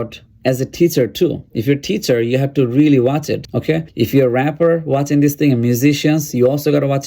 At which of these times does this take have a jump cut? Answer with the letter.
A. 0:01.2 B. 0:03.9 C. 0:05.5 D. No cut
B